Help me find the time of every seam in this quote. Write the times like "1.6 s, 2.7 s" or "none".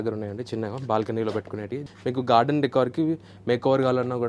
1.8 s